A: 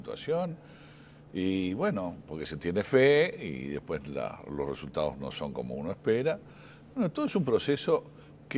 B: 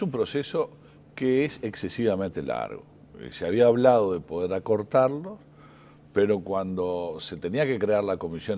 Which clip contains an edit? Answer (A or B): A